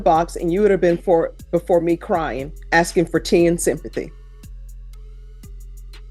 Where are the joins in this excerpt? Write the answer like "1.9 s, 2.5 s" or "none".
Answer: none